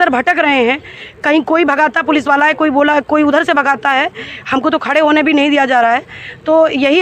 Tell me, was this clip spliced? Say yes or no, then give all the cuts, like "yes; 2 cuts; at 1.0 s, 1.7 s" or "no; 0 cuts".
no; 0 cuts